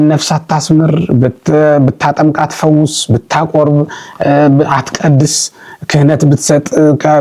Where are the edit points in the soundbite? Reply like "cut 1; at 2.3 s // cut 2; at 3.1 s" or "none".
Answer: none